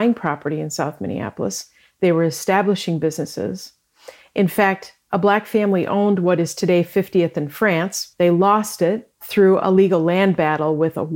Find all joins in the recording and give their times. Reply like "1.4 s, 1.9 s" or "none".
none